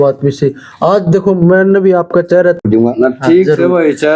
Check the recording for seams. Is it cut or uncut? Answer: cut